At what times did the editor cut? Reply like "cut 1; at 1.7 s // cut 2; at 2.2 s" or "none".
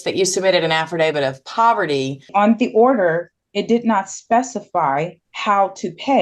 cut 1; at 2.3 s // cut 2; at 5.2 s